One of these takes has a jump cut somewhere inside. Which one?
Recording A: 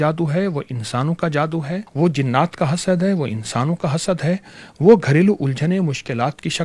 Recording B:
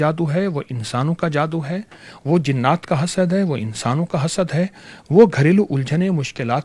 A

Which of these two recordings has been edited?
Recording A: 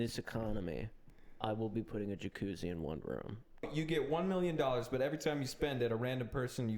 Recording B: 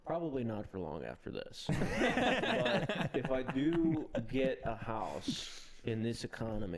A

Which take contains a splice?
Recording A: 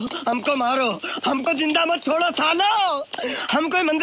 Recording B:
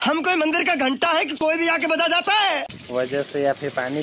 B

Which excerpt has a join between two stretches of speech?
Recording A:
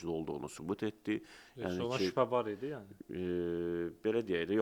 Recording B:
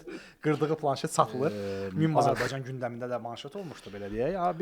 B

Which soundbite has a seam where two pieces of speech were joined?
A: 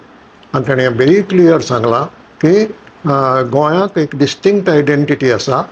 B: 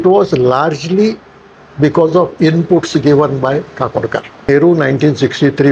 B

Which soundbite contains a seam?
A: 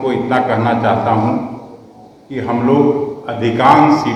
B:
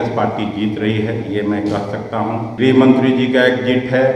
B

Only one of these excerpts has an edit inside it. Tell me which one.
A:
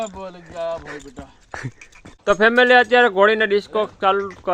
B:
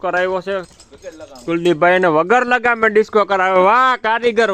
A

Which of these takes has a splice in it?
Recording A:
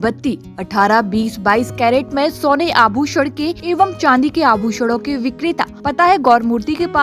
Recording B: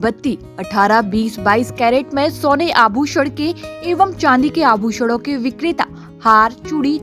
A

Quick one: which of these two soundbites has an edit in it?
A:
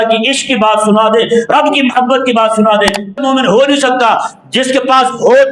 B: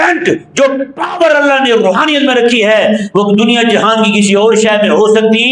A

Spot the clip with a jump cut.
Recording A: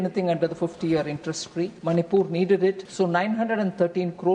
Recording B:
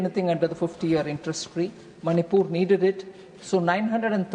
A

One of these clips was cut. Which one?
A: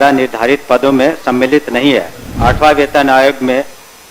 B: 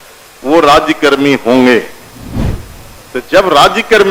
A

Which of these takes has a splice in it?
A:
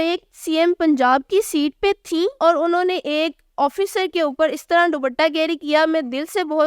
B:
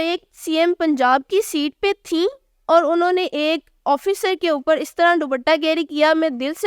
A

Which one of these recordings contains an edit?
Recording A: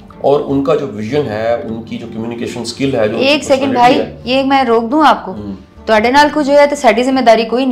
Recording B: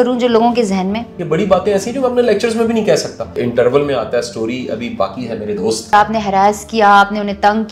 B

